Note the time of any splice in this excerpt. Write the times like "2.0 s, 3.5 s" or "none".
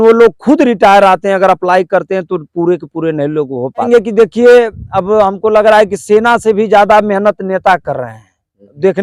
3.9 s